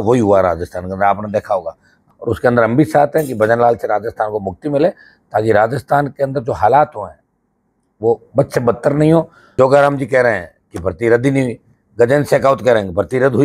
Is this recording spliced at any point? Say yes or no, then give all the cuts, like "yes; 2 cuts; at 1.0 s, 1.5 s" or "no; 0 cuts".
yes; 2 cuts; at 2.0 s, 9.4 s